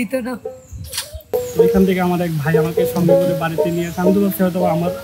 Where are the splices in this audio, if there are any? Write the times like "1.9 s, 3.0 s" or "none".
1.1 s